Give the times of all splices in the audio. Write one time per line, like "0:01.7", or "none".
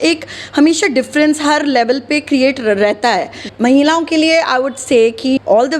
0:03.4